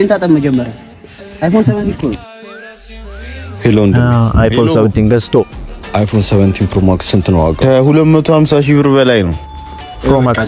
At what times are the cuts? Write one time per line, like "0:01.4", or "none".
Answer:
none